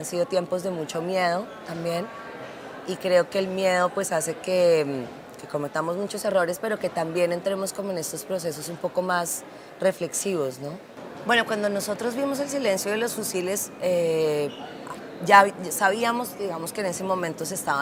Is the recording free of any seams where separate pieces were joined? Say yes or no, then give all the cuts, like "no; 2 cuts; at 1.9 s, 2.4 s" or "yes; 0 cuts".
yes; 0 cuts